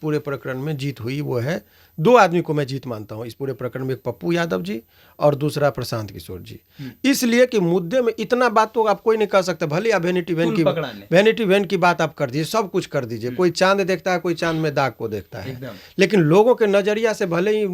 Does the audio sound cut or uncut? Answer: uncut